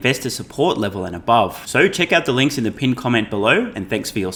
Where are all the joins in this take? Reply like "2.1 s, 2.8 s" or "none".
none